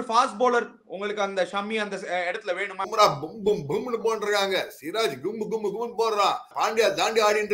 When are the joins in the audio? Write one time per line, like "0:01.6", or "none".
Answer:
0:02.9
0:06.5